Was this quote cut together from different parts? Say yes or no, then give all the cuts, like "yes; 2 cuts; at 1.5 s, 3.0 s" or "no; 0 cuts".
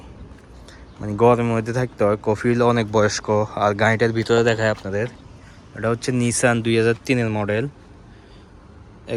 no; 0 cuts